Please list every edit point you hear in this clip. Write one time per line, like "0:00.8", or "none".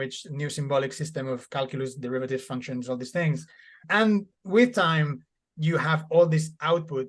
none